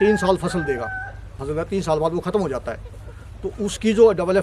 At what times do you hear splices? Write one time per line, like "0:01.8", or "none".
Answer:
0:01.4